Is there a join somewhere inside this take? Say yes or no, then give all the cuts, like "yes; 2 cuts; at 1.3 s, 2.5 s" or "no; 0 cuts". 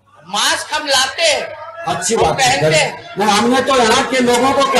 no; 0 cuts